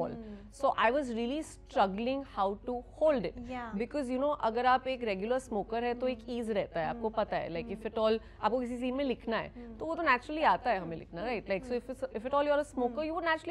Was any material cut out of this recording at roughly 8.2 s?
no; 0 cuts

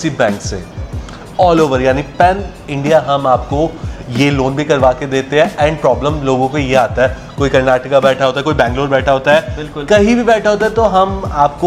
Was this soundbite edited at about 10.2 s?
no; 0 cuts

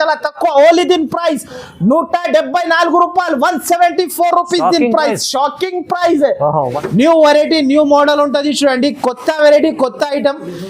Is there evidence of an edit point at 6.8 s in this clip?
yes; 1 cut; at 6.8 s

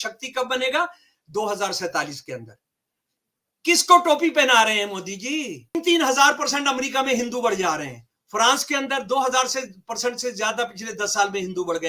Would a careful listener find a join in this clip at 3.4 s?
no; 1 cut; at 5.8 s

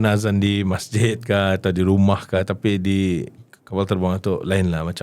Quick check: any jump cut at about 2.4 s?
yes; 1 cut; at 2.4 s

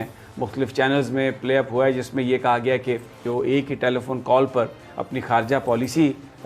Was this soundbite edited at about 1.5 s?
no; 1 cut; at 3.2 s

